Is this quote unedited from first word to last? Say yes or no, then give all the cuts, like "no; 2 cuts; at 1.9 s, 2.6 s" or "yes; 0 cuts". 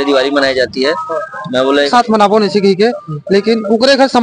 no; 1 cut; at 1.9 s